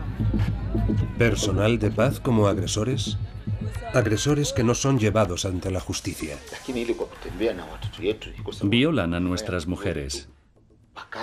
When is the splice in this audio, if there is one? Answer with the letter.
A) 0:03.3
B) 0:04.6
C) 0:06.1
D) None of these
B